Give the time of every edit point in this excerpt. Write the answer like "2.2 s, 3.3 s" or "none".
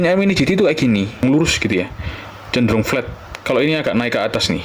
1.2 s